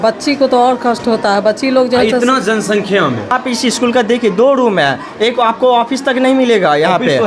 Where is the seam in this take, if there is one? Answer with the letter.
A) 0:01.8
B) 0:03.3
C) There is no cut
B